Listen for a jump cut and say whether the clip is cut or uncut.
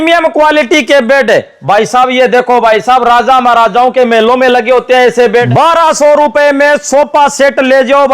cut